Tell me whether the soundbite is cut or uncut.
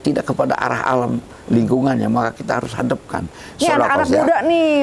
cut